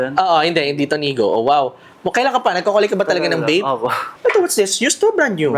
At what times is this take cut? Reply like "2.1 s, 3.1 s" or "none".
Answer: 4.0 s